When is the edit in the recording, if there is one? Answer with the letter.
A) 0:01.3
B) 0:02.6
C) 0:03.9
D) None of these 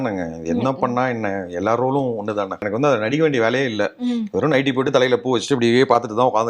B